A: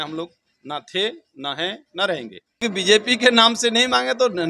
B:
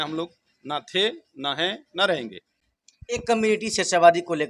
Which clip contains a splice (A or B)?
A